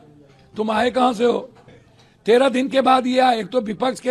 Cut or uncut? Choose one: uncut